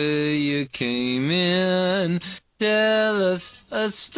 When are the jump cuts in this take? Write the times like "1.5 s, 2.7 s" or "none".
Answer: 2.4 s